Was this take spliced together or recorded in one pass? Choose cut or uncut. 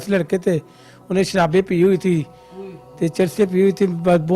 uncut